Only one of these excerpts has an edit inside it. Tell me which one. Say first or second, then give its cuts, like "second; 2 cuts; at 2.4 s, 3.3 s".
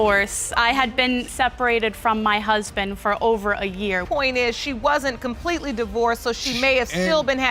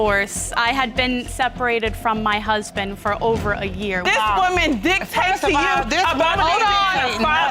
second; 1 cut; at 4.0 s